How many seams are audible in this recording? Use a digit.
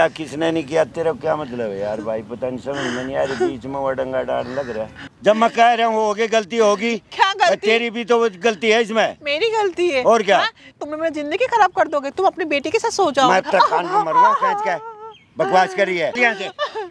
3